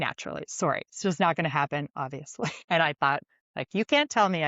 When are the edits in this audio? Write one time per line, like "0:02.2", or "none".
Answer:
0:02.6